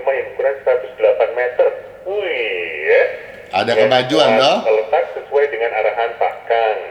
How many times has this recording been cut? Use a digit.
0